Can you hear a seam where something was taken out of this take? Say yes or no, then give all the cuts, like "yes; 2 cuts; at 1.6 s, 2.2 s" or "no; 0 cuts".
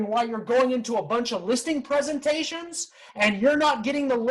no; 0 cuts